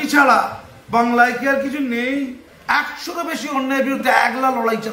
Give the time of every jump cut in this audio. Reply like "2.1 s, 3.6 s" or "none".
2.5 s